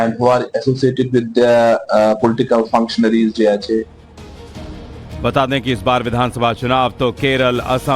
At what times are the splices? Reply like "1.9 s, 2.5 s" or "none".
2.0 s